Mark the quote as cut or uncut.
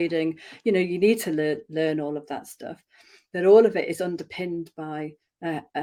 uncut